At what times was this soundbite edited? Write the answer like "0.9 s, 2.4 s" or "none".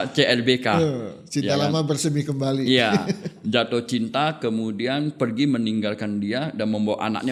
none